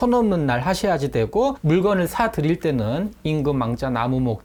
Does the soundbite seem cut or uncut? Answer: uncut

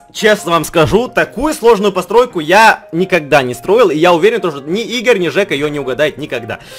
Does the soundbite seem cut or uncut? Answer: uncut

